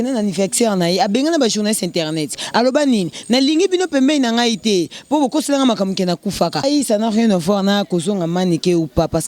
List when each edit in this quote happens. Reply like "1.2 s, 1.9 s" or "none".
6.6 s